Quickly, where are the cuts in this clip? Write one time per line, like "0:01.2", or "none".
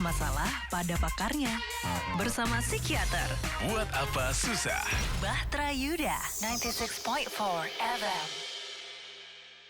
none